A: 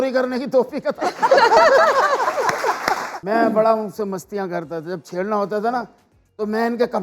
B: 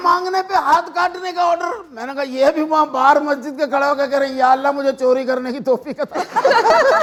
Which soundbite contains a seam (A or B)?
A